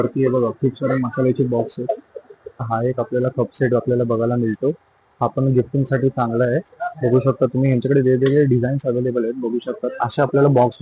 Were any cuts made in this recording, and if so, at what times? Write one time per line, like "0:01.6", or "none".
0:02.7